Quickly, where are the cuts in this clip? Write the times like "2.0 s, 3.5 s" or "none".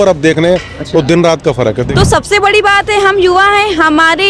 1.8 s